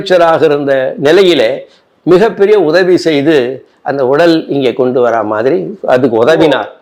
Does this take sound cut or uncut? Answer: uncut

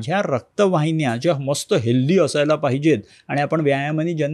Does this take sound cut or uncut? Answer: uncut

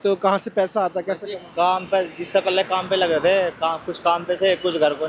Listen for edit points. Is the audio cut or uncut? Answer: uncut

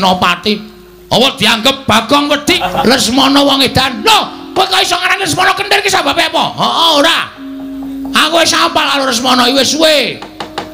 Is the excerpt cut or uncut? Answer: cut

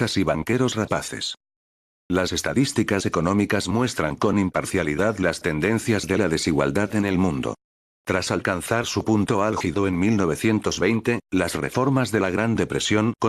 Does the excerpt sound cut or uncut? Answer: cut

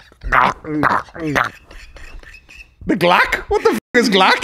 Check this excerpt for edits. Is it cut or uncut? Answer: uncut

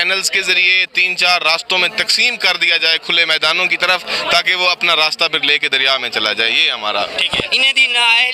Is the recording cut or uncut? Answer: cut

